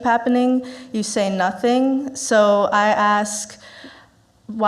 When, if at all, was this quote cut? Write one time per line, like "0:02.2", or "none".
none